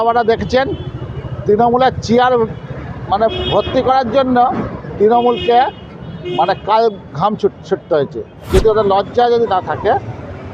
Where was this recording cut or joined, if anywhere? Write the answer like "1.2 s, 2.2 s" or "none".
8.5 s